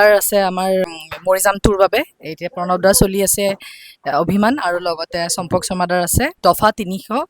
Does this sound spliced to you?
yes; 1 cut; at 1.0 s

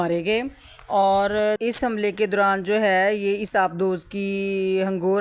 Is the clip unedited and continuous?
yes; 0 cuts

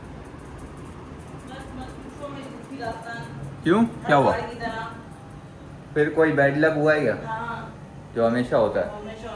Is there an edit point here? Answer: no; 0 cuts

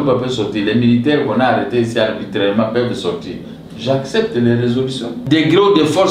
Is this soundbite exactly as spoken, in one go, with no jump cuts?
no; 1 cut; at 5.2 s

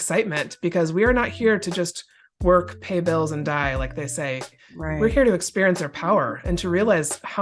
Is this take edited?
no; 0 cuts

